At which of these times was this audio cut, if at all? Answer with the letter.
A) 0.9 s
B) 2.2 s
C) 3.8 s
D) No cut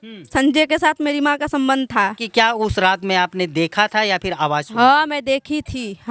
B